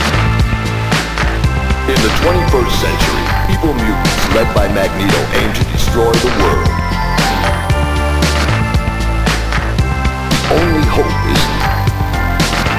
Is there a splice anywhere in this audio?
no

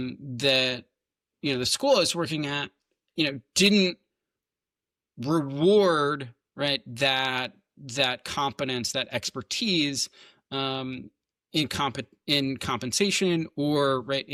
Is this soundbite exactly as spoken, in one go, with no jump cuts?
yes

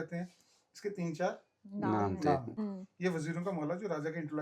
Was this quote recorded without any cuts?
no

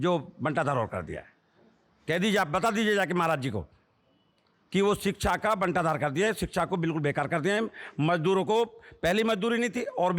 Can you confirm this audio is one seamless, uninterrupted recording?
yes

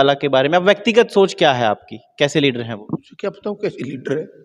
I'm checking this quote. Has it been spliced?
yes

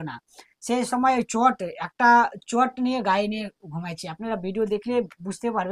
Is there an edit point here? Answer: no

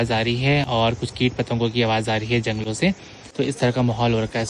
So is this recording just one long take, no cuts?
yes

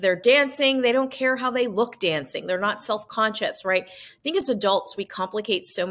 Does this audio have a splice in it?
no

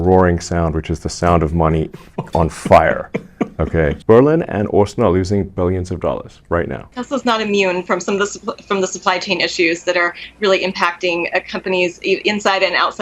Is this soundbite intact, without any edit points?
no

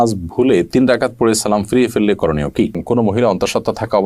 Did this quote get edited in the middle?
yes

